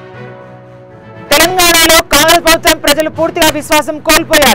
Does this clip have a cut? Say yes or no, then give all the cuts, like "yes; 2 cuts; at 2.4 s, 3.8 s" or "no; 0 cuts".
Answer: yes; 1 cut; at 1.1 s